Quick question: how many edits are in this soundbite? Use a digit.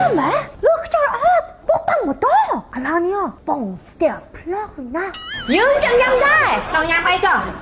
1